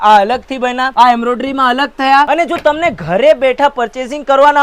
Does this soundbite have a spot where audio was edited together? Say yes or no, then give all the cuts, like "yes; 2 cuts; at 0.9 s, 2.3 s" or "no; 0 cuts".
yes; 1 cut; at 2.3 s